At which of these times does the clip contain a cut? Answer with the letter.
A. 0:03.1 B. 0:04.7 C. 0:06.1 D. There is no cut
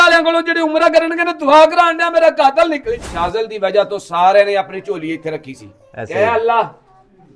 A